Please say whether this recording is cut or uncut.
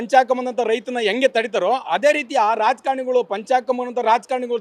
uncut